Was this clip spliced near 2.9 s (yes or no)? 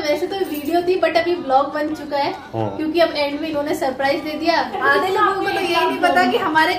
no